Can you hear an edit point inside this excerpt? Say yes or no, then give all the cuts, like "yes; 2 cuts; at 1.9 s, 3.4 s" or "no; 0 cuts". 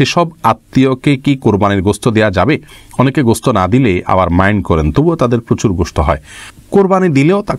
no; 0 cuts